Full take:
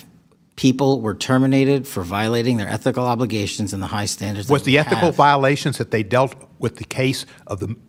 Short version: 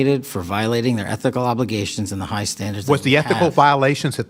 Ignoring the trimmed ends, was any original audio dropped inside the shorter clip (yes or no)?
no